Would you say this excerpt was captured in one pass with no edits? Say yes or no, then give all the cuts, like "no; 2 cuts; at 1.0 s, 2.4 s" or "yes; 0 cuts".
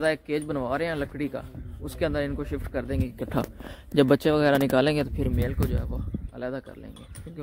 yes; 0 cuts